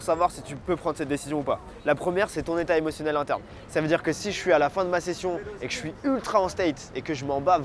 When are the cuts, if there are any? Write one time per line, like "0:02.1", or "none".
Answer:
none